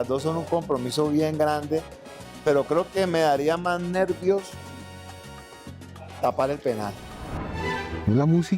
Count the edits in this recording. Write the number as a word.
one